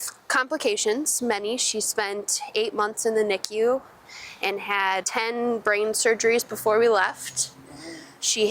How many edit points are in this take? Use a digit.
1